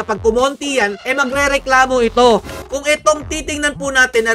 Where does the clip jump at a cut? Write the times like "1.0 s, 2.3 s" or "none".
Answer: 2.6 s